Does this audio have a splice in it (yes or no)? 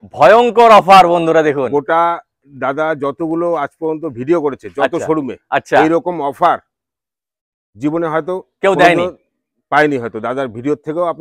no